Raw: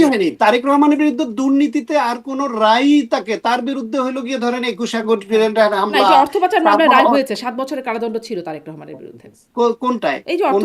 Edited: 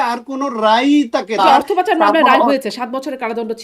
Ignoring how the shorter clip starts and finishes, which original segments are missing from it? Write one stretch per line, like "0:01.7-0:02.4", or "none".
0:03.4-0:06.0